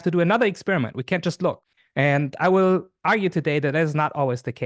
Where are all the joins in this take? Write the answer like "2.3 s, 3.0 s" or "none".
1.6 s